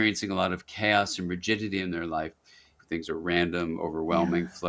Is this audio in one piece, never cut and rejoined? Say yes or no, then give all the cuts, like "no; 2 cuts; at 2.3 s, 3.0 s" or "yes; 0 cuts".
no; 1 cut; at 2.7 s